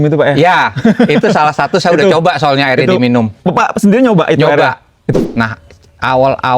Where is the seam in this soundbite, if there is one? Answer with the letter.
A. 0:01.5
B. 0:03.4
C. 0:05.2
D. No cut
C